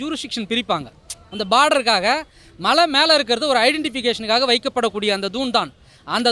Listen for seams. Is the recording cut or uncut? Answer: uncut